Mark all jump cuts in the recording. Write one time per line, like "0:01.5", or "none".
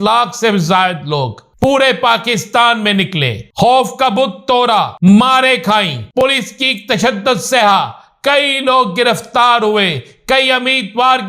0:01.4
0:03.4
0:04.9
0:06.2